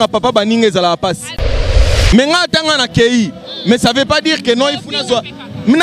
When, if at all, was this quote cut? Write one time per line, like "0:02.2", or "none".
0:01.7